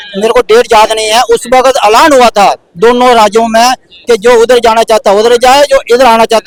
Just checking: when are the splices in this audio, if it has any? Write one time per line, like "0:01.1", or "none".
none